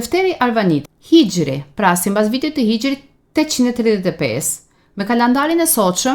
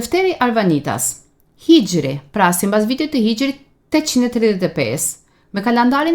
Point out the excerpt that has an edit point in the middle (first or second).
first